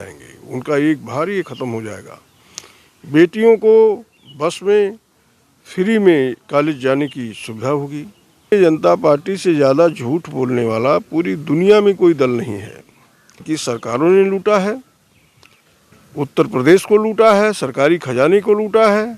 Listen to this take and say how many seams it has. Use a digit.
2